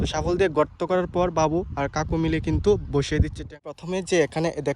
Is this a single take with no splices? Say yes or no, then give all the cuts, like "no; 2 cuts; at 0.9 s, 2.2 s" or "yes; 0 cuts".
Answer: no; 1 cut; at 3.6 s